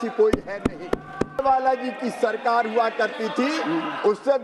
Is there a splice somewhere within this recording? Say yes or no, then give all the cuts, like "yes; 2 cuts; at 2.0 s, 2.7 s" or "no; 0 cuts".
yes; 1 cut; at 1.4 s